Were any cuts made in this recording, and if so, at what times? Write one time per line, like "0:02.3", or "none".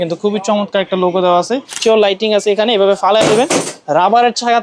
0:01.8